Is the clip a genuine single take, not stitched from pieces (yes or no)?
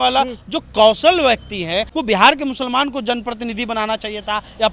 no